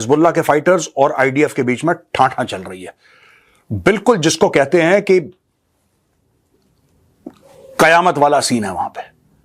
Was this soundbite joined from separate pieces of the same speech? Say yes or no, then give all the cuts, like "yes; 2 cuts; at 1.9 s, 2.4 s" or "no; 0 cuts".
no; 0 cuts